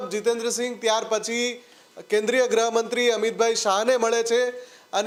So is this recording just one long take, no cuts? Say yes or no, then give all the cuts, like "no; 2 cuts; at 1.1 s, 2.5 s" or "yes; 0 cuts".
yes; 0 cuts